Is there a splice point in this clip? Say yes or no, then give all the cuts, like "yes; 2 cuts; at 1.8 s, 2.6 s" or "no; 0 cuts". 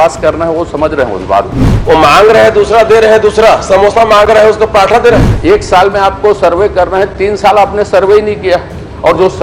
yes; 2 cuts; at 1.6 s, 5.3 s